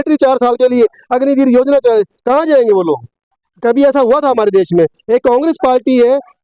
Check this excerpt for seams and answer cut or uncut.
uncut